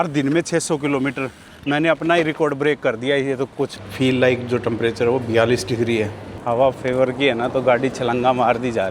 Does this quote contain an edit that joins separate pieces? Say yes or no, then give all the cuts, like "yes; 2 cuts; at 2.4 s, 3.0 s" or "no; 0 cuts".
yes; 2 cuts; at 3.8 s, 6.3 s